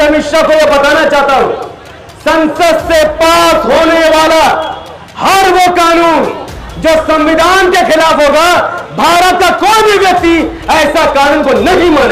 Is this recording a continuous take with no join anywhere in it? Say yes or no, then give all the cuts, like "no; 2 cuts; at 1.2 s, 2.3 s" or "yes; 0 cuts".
yes; 0 cuts